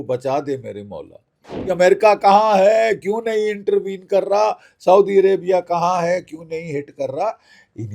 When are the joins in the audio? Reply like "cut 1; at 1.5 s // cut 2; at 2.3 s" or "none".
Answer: cut 1; at 1.6 s